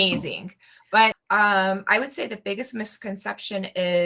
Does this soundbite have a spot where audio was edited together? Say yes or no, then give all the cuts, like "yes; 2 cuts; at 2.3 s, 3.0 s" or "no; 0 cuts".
yes; 1 cut; at 1.2 s